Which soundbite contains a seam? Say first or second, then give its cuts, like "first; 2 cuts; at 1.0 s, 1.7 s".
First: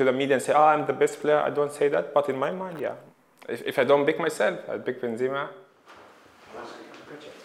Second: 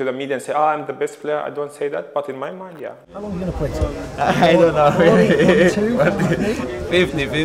second; 1 cut; at 3.3 s